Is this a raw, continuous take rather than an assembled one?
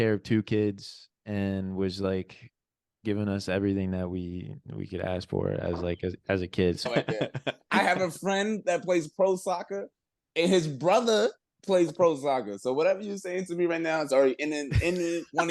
no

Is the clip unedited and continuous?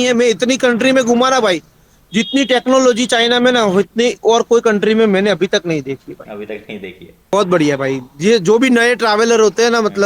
no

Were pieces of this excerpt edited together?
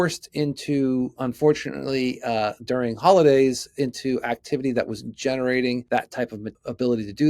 yes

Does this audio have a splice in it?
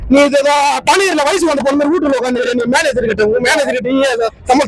no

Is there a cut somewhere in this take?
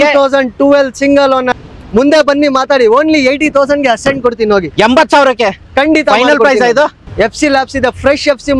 yes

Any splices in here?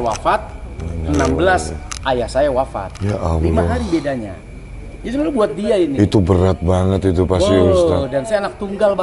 no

